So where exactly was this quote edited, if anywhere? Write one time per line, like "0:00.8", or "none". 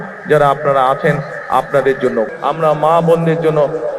0:02.3